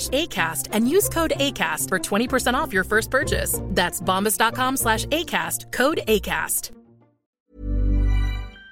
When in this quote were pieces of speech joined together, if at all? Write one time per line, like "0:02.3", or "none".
0:07.5

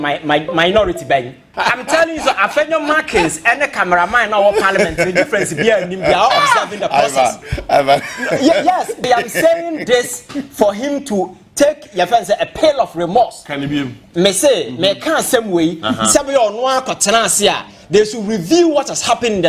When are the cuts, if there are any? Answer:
0:01.5
0:09.0

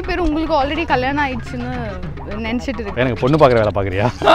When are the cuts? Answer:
0:02.9

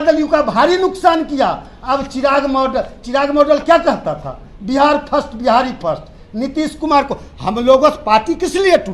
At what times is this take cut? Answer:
none

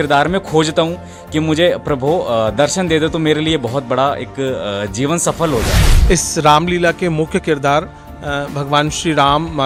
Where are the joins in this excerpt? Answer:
none

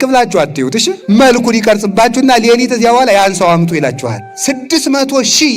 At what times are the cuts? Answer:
0:04.3

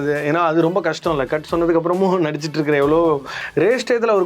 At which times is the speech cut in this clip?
0:03.4

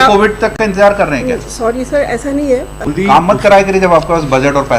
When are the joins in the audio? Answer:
0:02.8

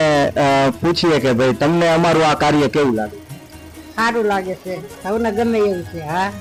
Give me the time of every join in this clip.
none

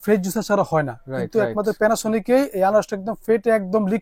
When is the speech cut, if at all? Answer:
none

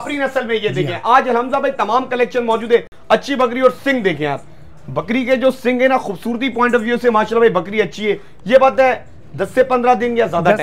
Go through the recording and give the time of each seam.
none

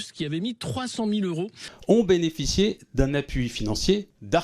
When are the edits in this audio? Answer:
0:01.7

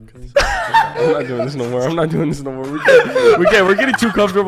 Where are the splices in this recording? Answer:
none

